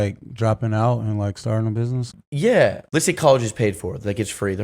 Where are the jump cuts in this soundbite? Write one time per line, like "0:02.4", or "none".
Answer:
0:02.1
0:02.8